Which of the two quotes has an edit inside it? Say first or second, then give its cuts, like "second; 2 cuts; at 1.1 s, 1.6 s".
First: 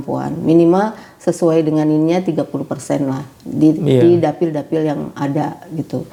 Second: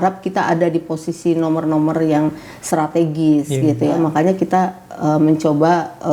second; 1 cut; at 4.0 s